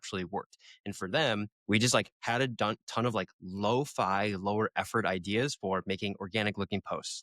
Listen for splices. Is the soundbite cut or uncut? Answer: cut